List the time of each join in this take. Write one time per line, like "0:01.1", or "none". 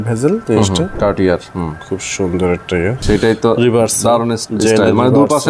0:00.9
0:03.0
0:04.4